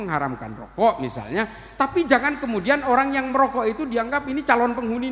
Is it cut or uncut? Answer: uncut